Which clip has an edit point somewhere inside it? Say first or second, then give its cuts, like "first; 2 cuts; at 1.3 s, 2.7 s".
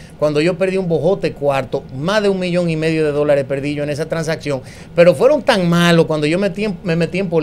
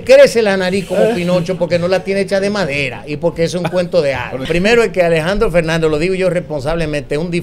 second; 1 cut; at 4.5 s